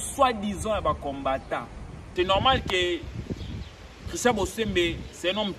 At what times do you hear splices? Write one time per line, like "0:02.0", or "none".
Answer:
0:02.0